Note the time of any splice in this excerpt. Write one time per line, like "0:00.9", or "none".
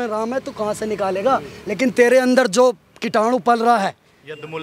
none